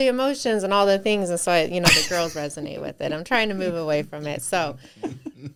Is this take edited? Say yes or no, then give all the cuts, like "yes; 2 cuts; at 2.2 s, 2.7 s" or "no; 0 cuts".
no; 0 cuts